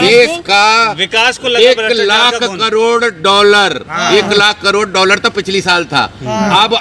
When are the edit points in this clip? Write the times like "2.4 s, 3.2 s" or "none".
none